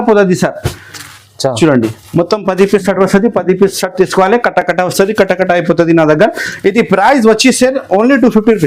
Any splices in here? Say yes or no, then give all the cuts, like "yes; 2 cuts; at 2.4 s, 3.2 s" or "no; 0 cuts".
no; 0 cuts